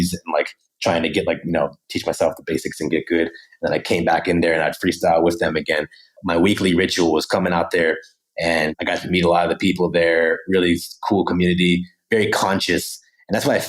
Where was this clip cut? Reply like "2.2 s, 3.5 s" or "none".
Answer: none